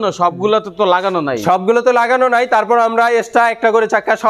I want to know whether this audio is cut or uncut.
uncut